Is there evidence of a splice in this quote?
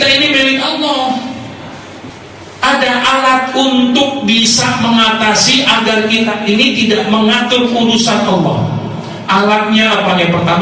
yes; 1 cut; at 2.0 s

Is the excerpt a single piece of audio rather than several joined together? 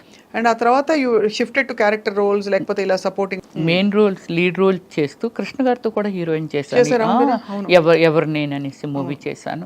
no; 1 cut; at 3.4 s

